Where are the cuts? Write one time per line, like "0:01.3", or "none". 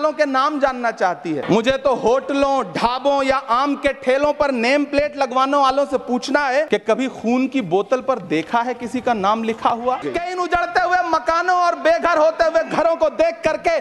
0:01.4
0:06.7
0:10.1